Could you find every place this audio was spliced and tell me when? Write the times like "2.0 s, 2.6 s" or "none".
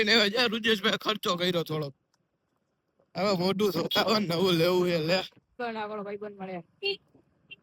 5.6 s